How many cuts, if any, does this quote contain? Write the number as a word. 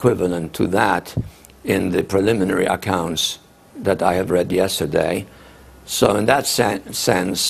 zero